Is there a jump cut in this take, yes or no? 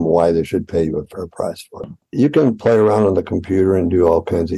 yes